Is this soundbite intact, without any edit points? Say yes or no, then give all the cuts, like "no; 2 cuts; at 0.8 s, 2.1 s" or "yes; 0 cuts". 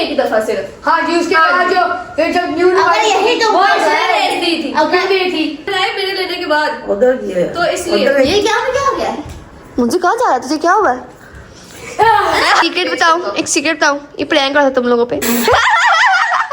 no; 2 cuts; at 5.7 s, 12.6 s